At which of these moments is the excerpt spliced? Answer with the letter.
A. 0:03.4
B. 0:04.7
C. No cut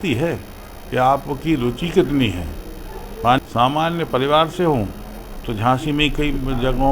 A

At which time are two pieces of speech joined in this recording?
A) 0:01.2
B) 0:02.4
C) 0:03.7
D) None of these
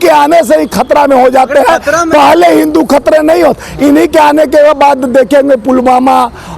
D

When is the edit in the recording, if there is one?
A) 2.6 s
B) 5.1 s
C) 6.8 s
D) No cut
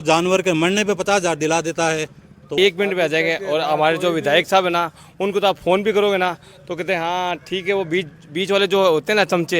A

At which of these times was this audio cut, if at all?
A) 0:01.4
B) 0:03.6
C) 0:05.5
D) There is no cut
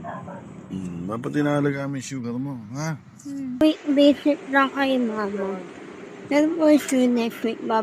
B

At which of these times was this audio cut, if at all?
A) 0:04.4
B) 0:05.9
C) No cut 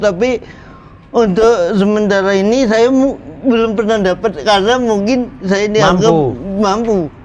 C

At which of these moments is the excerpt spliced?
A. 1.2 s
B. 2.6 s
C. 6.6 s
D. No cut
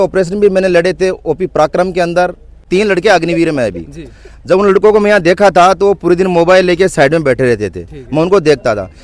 B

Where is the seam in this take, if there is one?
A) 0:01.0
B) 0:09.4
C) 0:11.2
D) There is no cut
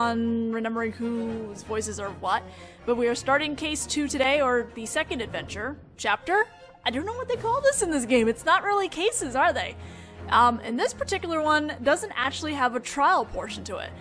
C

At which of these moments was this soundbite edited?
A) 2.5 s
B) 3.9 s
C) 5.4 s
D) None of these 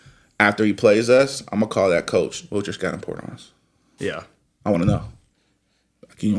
D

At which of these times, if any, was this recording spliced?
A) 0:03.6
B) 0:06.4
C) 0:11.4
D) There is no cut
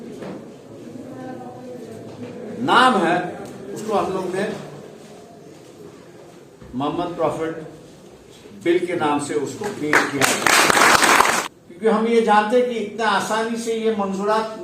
C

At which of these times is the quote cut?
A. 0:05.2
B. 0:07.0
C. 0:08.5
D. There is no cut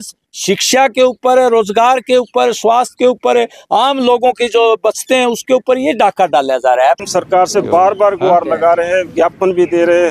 B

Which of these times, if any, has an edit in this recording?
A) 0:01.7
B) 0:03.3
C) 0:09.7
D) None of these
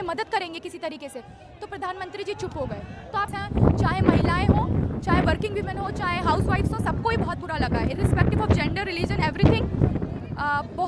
B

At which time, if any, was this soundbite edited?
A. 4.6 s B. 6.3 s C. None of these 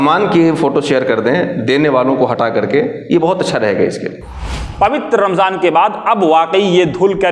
A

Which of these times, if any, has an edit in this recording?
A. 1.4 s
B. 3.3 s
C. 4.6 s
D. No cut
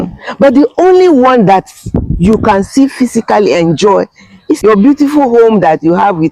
C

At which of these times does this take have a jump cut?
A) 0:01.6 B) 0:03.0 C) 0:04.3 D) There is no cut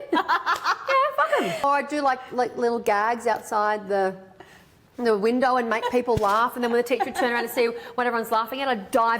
A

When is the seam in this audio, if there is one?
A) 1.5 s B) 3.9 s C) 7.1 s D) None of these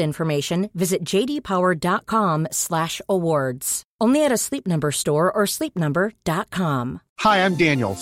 C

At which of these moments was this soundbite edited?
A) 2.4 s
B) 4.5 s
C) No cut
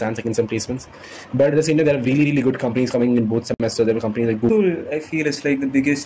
B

